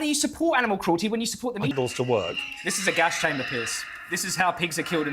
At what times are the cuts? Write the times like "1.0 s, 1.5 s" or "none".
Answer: 1.7 s

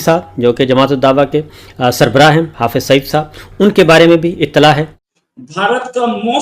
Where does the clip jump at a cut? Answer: 5.0 s

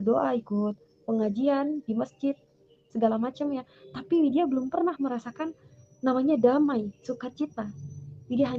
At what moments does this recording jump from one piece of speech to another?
none

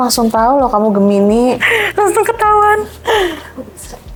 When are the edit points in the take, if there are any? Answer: none

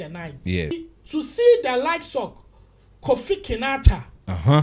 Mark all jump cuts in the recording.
0.9 s

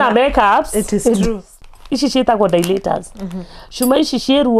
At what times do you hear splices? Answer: 1.5 s

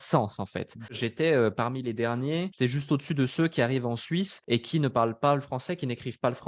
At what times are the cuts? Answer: 1.0 s, 2.5 s, 4.4 s

